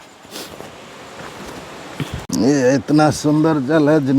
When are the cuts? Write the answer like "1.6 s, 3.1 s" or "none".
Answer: 2.3 s